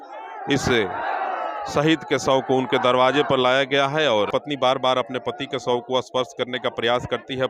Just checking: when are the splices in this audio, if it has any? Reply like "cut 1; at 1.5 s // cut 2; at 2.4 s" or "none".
cut 1; at 4.3 s